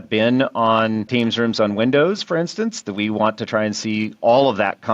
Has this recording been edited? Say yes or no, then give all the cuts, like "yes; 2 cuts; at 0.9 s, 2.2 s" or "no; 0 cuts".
yes; 1 cut; at 1.1 s